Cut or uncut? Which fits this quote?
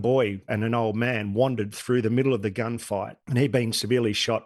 cut